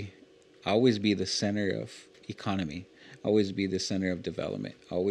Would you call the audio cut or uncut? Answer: cut